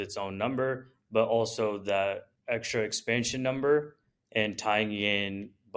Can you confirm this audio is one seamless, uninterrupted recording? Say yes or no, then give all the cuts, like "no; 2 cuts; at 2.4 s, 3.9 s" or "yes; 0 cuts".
no; 1 cut; at 2.3 s